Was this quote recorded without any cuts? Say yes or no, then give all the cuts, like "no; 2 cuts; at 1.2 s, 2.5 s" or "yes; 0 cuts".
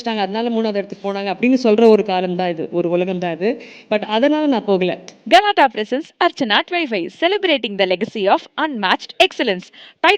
no; 1 cut; at 5.1 s